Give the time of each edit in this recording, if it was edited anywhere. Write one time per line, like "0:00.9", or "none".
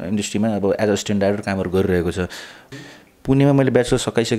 0:02.5